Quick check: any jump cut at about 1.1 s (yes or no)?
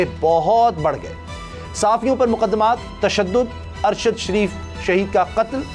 no